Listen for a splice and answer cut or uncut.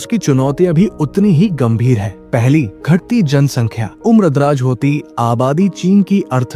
uncut